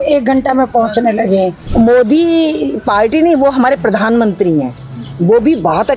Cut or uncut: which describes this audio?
cut